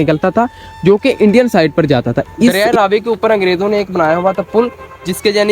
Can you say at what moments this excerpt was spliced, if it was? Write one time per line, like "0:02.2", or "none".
0:02.6